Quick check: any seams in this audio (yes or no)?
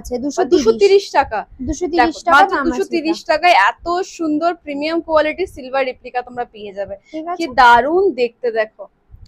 no